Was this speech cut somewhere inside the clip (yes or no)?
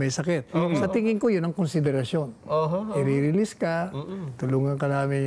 no